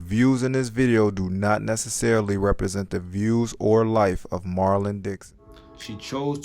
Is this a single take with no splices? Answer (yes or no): no